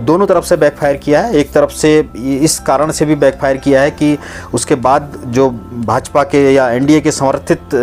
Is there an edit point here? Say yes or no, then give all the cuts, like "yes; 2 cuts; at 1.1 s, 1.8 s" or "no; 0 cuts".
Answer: no; 0 cuts